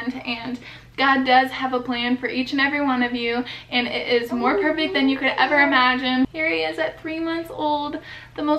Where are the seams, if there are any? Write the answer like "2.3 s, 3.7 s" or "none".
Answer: 6.3 s